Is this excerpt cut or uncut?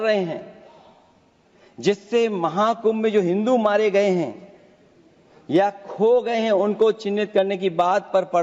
uncut